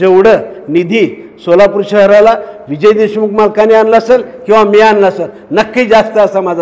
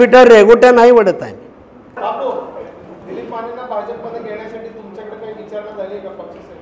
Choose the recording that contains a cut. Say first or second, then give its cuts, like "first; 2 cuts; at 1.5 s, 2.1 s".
second; 1 cut; at 2.0 s